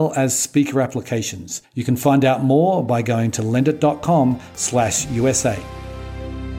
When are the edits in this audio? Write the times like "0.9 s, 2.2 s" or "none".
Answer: 5.7 s